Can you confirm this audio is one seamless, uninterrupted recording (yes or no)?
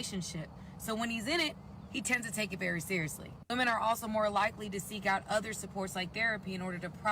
no